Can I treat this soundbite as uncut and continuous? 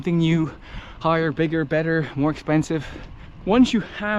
no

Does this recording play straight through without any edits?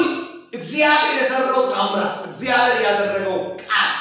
yes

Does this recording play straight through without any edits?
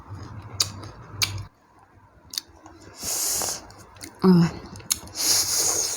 no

